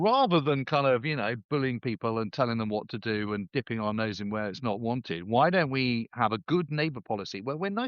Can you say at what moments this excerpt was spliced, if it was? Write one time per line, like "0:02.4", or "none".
none

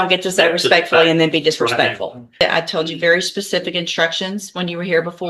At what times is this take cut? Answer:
0:02.4

